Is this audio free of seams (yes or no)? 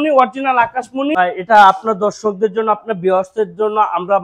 no